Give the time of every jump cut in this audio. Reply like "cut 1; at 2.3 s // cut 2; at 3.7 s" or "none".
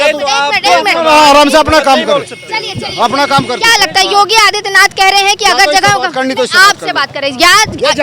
none